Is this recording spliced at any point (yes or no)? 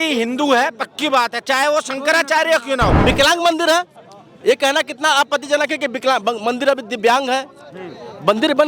yes